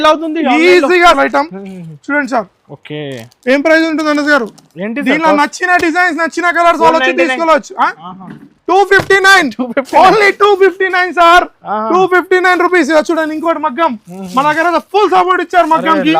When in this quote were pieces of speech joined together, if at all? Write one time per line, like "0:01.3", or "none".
0:01.2